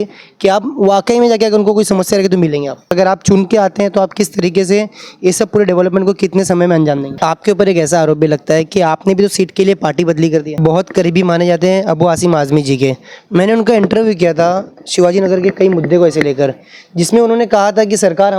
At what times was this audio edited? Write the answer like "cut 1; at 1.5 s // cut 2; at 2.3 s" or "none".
cut 1; at 2.9 s // cut 2; at 7.1 s // cut 3; at 10.6 s